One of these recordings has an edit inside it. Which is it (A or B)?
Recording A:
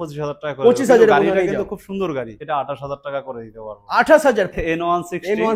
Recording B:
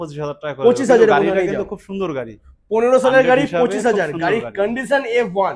A